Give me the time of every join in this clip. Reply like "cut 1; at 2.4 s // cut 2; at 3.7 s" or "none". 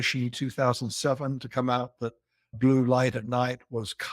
cut 1; at 2.5 s